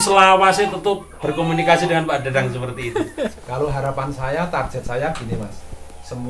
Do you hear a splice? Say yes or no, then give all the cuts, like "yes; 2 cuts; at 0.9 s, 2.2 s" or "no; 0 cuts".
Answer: yes; 1 cut; at 3.3 s